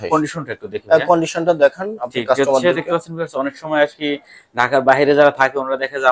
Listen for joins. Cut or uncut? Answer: uncut